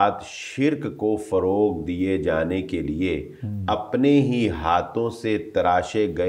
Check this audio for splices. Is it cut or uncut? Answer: uncut